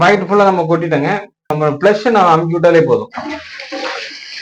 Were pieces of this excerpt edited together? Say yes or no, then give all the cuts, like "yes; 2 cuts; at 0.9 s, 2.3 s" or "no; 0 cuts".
yes; 1 cut; at 1.5 s